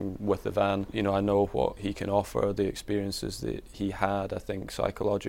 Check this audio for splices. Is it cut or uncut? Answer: cut